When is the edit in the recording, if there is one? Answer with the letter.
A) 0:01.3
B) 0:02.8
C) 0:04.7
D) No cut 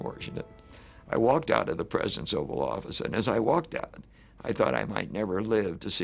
D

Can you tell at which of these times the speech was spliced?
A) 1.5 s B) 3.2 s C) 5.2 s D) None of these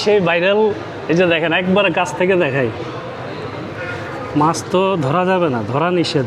D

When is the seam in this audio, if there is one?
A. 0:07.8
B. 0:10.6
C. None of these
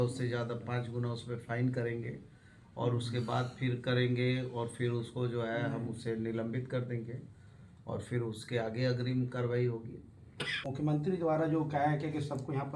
B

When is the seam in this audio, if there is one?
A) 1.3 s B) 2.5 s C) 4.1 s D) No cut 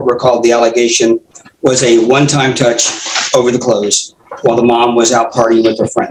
D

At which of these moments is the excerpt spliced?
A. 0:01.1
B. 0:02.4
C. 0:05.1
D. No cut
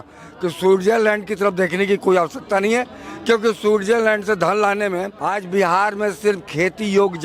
C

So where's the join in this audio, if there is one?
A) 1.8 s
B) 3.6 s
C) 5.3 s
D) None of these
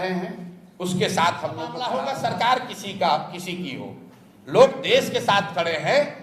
A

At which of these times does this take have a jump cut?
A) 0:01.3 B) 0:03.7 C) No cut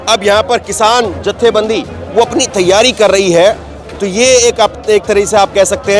B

